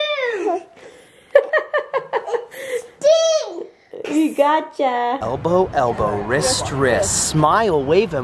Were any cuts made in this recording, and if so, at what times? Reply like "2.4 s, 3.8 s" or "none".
5.2 s